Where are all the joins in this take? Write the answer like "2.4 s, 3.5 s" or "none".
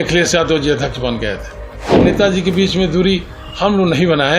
2.0 s